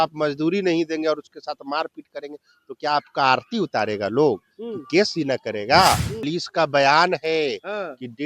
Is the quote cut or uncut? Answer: cut